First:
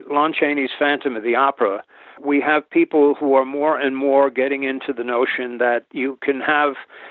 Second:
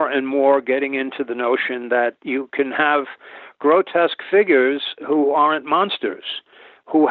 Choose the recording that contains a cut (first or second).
first